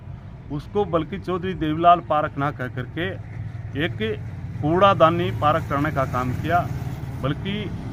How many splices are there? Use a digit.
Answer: 0